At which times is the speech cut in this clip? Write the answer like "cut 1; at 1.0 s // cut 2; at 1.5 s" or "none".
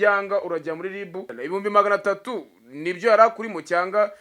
cut 1; at 1.3 s